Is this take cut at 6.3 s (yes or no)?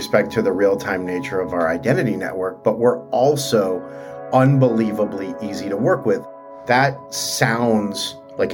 yes